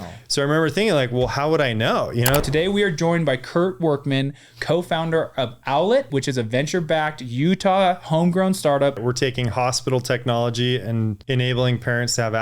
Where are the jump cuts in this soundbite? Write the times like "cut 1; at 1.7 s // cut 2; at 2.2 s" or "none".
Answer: cut 1; at 2.4 s // cut 2; at 6.1 s // cut 3; at 9.0 s // cut 4; at 11.2 s

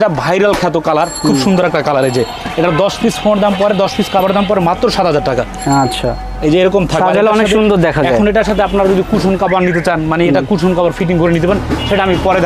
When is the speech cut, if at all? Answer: none

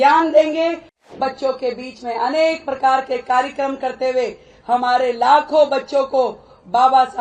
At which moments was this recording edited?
cut 1; at 1.1 s

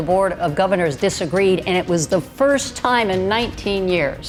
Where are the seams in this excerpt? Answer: none

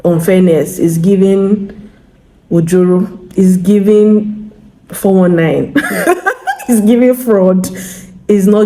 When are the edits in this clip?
none

